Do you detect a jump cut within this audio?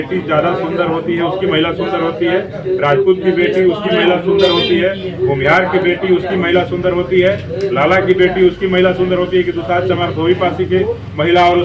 no; 0 cuts

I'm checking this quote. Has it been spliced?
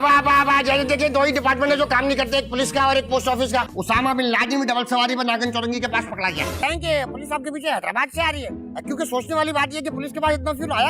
yes; 2 cuts; at 3.7 s, 6.6 s

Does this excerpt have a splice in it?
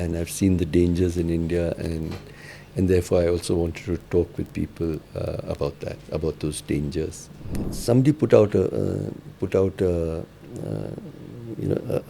yes; 1 cut; at 7.7 s

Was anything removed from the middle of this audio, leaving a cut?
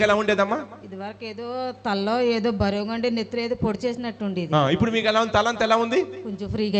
no; 0 cuts

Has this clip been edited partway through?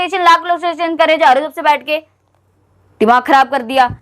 no; 0 cuts

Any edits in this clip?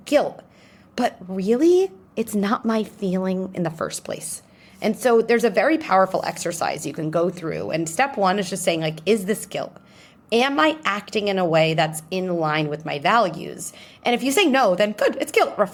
no; 0 cuts

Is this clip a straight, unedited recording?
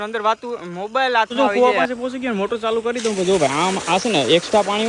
no; 1 cut; at 1.3 s

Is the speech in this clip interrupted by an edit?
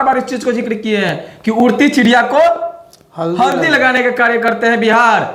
no; 0 cuts

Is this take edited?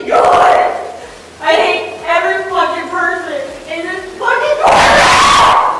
no; 0 cuts

